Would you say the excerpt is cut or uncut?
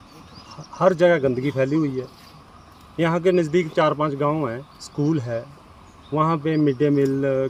uncut